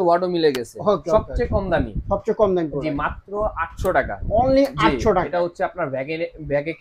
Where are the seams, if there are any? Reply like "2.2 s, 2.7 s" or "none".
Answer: 1.1 s